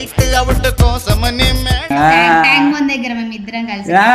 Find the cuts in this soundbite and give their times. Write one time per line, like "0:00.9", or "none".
0:01.9